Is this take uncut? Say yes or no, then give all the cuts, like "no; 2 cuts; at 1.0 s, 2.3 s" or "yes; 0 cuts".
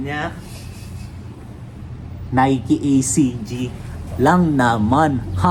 yes; 0 cuts